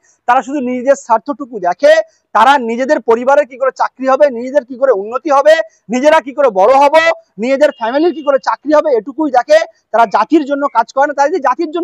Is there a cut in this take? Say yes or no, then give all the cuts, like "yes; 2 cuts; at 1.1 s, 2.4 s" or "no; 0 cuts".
no; 0 cuts